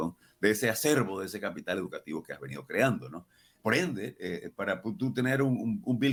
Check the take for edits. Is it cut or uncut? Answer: uncut